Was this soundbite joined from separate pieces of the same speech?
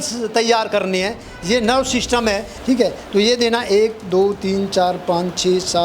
yes; 1 cut; at 2.5 s

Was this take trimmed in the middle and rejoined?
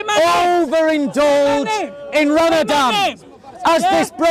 no; 0 cuts

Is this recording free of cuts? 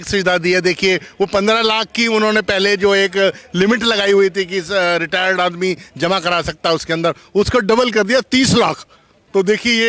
yes; 0 cuts

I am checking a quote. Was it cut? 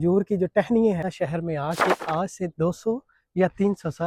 yes; 1 cut; at 1.1 s

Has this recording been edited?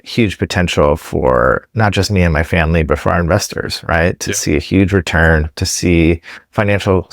no; 0 cuts

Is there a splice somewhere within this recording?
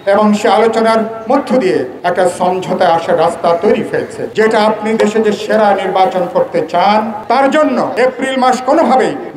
yes; 1 cut; at 4.2 s

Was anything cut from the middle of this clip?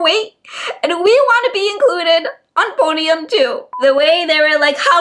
yes; 1 cut; at 3.7 s

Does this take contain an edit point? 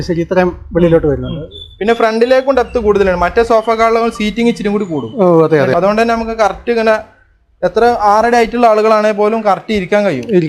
yes; 1 cut; at 5.7 s

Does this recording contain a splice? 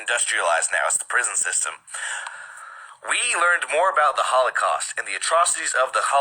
yes; 1 cut; at 3.2 s

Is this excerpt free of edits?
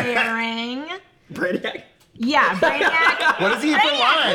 yes; 0 cuts

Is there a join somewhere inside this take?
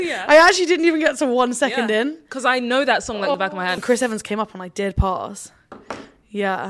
yes; 1 cut; at 3.4 s

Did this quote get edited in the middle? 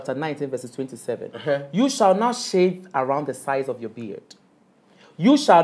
no; 0 cuts

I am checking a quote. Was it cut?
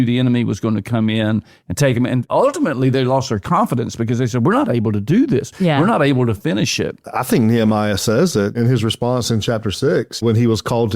yes; 4 cuts; at 2.2 s, 7.1 s, 8.5 s, 10.2 s

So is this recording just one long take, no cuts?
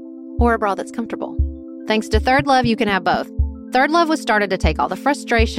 yes; 0 cuts

